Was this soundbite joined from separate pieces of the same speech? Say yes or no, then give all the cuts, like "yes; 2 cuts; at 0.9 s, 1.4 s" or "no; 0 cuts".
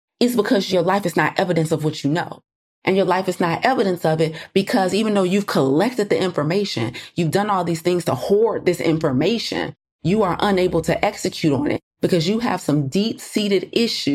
yes; 1 cut; at 2.5 s